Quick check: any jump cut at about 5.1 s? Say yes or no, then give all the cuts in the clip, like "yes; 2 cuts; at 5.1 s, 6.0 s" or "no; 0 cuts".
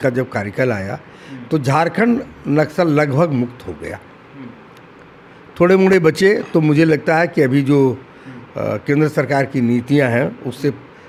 no; 0 cuts